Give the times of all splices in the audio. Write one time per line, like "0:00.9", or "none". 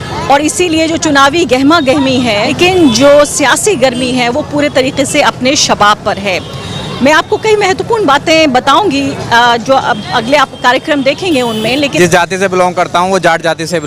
0:02.6
0:11.9